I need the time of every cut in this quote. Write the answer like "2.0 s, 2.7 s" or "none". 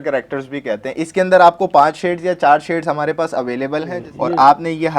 4.0 s